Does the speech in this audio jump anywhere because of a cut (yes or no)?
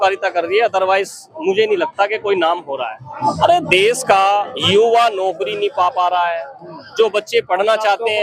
yes